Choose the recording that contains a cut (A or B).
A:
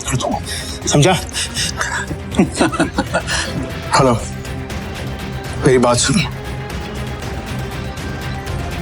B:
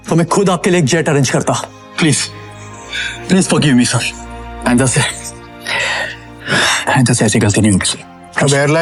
A